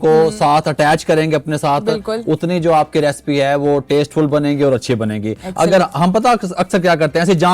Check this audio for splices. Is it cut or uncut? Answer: uncut